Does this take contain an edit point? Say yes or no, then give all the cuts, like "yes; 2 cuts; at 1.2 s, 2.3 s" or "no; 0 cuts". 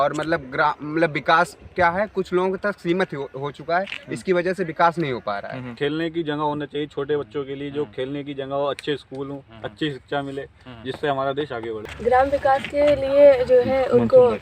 yes; 1 cut; at 5.7 s